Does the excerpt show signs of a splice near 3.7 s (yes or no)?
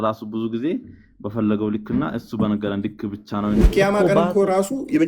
yes